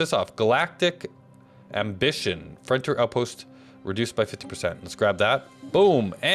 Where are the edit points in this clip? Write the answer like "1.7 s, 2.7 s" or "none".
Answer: none